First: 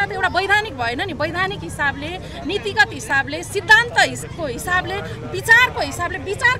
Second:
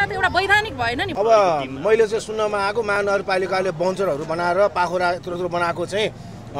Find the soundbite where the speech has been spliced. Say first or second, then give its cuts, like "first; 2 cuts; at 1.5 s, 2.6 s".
second; 1 cut; at 1.1 s